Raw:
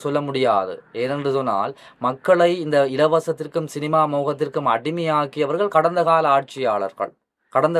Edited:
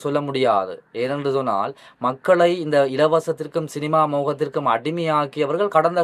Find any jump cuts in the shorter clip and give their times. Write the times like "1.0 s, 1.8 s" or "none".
none

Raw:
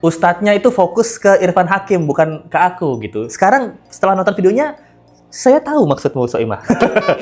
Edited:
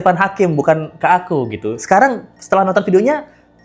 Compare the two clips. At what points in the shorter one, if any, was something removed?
none

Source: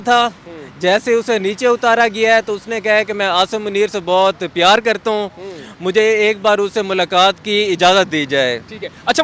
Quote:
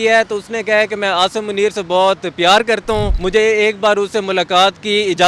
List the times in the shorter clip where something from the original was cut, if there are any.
3.2 s

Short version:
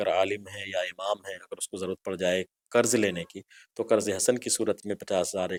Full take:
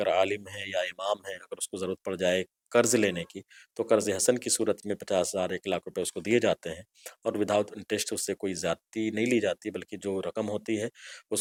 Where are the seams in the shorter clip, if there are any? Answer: none

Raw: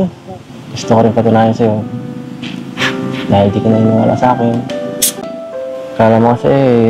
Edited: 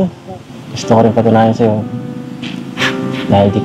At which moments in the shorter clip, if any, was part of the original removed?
none

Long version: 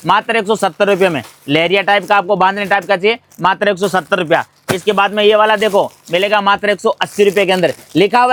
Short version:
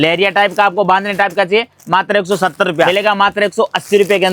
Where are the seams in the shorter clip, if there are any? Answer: 2.9 s

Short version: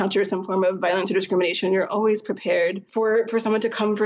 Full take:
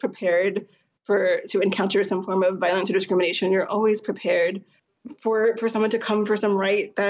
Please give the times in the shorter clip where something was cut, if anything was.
2.8 s

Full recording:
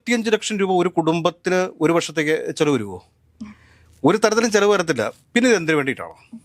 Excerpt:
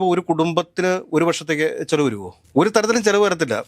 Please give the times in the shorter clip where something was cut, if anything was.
2.3 s

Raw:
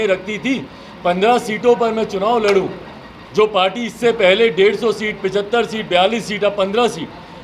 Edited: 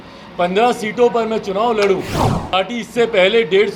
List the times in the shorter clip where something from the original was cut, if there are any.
2.5 s

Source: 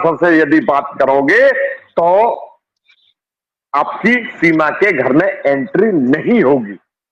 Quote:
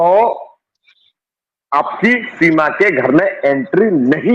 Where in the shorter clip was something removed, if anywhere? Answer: none

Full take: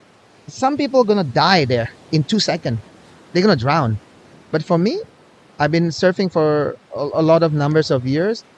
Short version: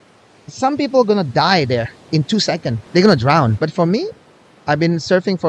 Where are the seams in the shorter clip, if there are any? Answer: 2.8 s, 3.5 s

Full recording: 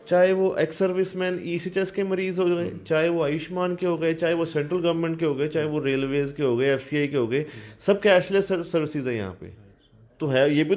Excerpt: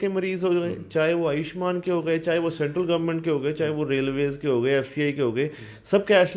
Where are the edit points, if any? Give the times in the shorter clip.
none

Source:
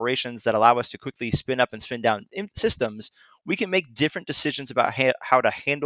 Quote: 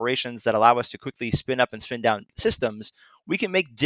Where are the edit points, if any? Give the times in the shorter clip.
2.3 s

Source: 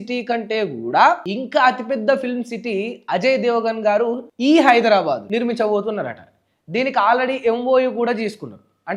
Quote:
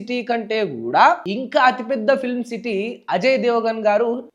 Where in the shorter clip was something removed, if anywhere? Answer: none

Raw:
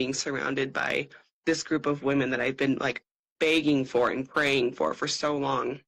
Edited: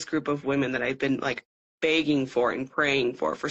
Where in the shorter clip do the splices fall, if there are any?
none

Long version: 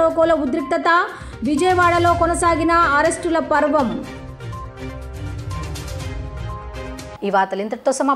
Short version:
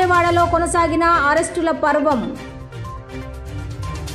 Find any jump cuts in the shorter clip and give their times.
none

